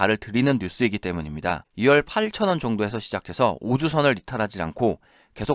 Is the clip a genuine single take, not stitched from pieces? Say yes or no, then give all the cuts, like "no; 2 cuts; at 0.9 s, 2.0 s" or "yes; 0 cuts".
no; 1 cut; at 1.6 s